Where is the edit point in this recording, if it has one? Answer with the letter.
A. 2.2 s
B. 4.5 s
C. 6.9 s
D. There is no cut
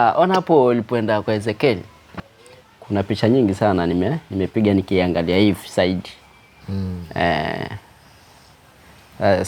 A